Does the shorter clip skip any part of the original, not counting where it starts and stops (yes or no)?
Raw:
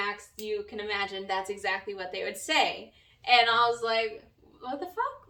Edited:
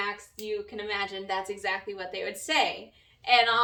no